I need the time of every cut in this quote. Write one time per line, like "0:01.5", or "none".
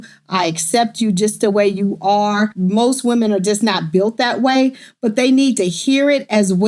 0:02.6